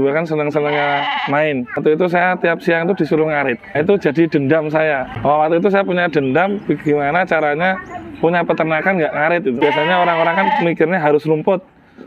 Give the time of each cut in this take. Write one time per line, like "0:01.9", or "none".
0:01.8
0:03.8
0:05.1
0:09.6